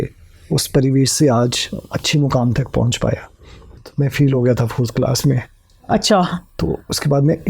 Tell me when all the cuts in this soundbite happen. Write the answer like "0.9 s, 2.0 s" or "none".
3.7 s